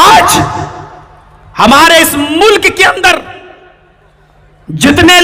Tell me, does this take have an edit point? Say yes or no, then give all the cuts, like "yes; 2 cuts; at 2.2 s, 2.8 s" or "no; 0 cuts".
no; 0 cuts